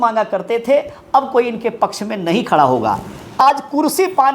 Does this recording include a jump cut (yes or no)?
yes